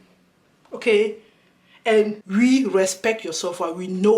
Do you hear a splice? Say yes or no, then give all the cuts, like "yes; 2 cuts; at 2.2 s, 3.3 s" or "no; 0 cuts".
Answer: yes; 1 cut; at 2.2 s